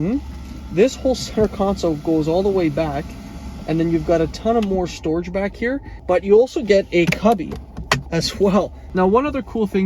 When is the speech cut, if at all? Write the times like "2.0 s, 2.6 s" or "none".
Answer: 5.9 s, 8.8 s